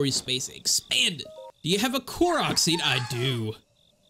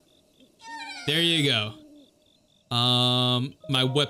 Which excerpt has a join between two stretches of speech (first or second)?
first